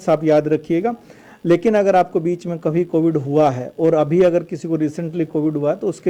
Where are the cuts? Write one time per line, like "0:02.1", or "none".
none